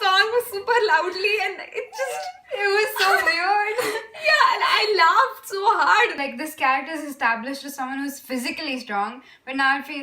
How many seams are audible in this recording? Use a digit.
1